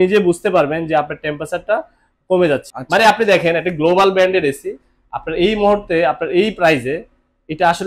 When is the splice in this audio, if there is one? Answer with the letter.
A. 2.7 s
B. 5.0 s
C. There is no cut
A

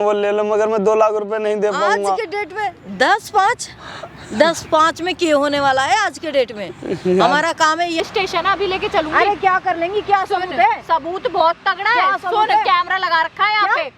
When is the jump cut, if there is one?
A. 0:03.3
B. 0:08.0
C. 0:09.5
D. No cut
B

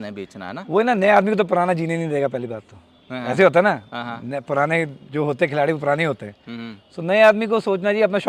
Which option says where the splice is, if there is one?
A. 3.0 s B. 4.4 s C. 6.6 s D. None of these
D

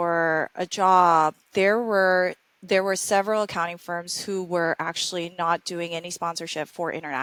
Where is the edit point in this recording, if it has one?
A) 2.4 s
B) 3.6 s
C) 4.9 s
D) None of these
D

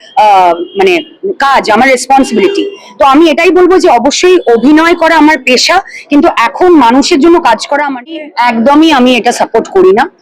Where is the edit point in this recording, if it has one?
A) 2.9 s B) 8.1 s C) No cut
B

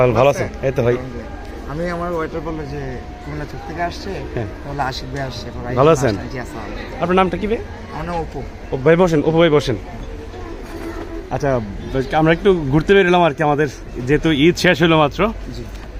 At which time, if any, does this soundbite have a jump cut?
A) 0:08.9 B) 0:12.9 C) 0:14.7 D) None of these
D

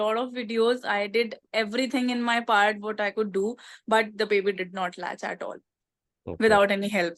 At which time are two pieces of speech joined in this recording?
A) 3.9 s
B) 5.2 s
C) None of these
C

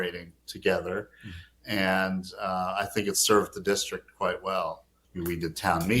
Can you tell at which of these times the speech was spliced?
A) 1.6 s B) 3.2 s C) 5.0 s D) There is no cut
C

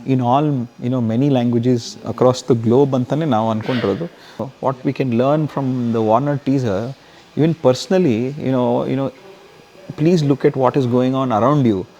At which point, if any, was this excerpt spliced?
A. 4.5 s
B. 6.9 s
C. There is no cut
A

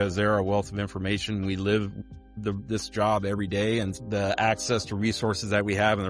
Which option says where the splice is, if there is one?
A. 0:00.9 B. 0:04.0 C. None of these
B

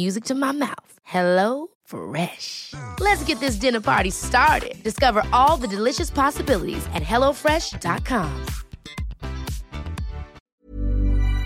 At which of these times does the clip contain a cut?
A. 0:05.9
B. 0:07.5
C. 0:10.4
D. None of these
C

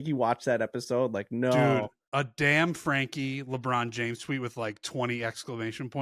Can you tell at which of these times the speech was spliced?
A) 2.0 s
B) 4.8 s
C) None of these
A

